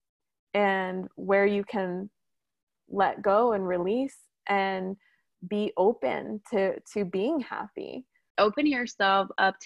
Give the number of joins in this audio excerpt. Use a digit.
1